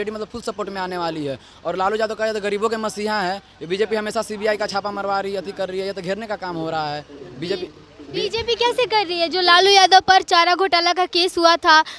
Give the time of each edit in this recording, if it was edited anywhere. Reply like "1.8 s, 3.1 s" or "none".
none